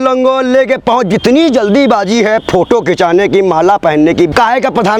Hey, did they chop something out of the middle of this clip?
no; 0 cuts

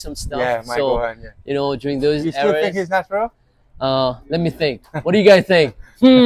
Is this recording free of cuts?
yes; 0 cuts

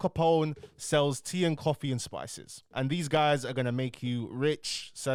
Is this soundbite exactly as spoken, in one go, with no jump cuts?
yes; 0 cuts

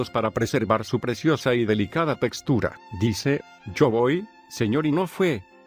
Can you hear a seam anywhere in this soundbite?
yes; 1 cut; at 4.3 s

